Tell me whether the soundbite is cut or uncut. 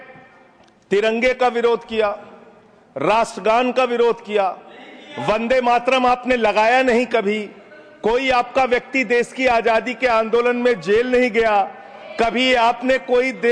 uncut